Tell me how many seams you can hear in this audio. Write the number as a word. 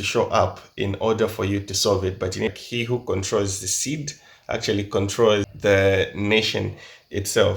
two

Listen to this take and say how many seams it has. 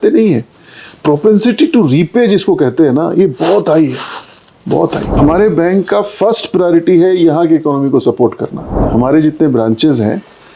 two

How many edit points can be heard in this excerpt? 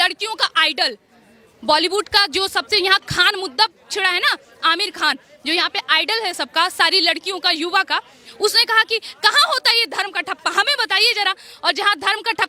zero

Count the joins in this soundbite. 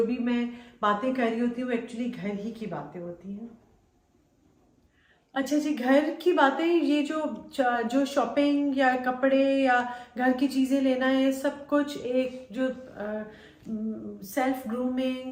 zero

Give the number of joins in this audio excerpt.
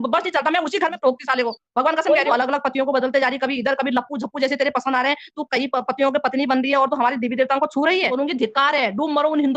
two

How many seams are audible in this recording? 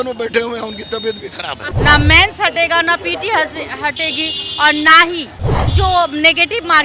one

